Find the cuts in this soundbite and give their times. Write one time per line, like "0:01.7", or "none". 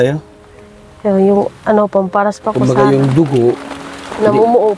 0:02.6